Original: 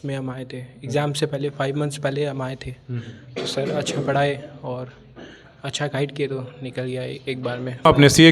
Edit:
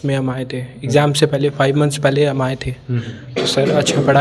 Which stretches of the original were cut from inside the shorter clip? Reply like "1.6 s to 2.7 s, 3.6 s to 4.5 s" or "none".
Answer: none